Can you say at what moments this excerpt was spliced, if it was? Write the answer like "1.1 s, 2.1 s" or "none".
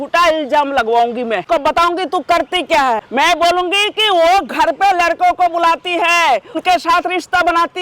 1.4 s, 3.0 s, 6.6 s